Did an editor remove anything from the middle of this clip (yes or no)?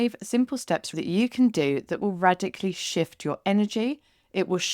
yes